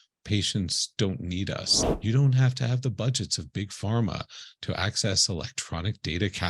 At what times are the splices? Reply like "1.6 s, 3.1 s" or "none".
1.8 s